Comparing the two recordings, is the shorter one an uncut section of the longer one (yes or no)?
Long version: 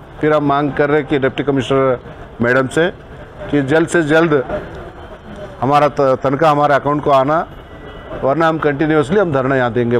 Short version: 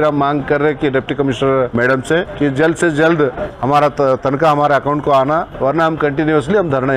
no